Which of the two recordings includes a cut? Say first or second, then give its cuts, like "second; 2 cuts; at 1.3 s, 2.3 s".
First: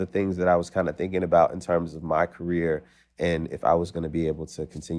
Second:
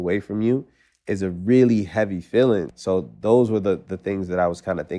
second; 1 cut; at 2.7 s